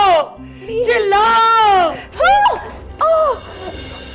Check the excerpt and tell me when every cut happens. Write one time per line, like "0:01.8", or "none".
0:02.0